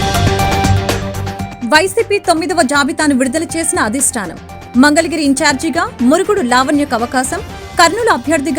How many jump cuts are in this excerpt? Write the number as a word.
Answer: one